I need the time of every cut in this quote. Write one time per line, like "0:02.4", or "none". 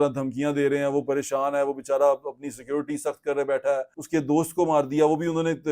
0:03.9